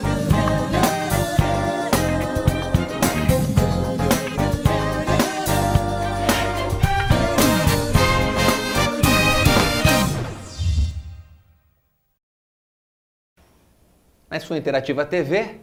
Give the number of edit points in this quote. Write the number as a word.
zero